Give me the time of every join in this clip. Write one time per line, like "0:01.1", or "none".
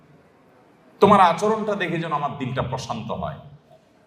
none